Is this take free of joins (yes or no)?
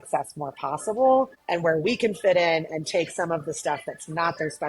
no